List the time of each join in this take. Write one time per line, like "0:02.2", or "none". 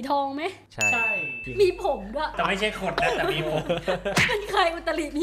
0:02.4